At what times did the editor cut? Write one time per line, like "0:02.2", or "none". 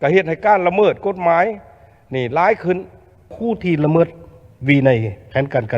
0:03.3